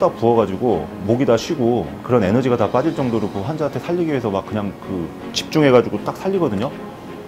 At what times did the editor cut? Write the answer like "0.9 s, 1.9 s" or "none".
1.9 s